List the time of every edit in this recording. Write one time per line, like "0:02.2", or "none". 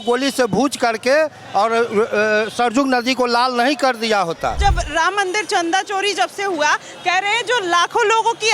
0:04.6